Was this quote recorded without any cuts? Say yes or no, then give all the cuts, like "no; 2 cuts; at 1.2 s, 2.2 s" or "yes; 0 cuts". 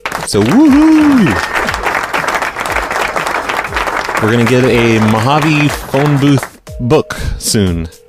yes; 0 cuts